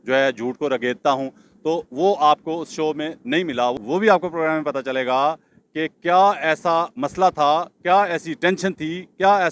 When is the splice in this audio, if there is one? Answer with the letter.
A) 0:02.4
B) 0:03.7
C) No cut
B